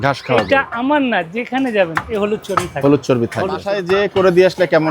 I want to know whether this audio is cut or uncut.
cut